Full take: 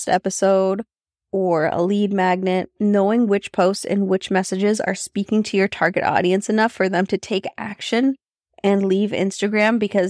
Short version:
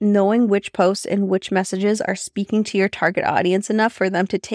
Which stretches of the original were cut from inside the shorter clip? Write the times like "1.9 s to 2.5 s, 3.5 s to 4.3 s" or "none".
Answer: none